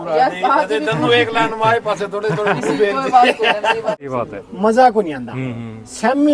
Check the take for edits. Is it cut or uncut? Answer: cut